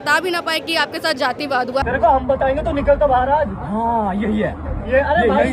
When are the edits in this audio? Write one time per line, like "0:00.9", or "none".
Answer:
0:01.8

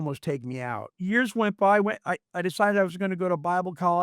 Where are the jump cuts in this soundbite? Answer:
0:01.0

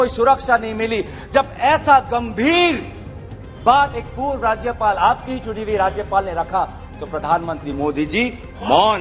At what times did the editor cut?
none

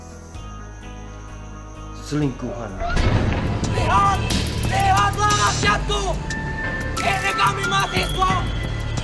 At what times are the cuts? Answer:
0:02.8
0:03.7

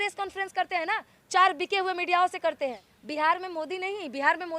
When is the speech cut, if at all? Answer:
0:02.9

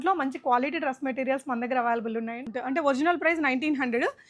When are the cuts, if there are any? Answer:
0:02.4

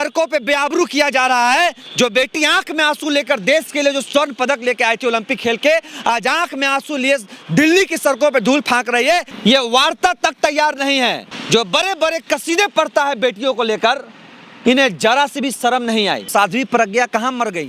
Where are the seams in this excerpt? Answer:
0:09.3
0:11.3
0:16.3

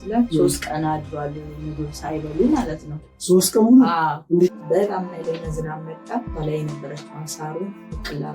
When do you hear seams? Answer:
0:04.5

